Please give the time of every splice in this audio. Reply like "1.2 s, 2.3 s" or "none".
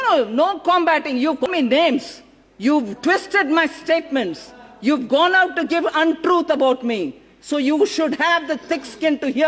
1.4 s